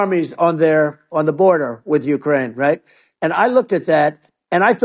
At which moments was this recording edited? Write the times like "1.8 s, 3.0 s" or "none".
none